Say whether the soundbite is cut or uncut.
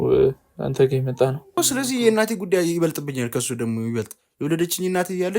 cut